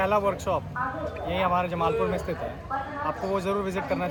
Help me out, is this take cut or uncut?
uncut